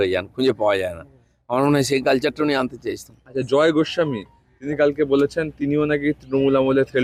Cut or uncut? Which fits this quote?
uncut